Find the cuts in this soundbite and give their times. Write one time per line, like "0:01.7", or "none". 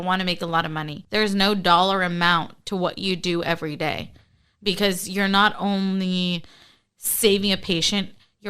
0:01.0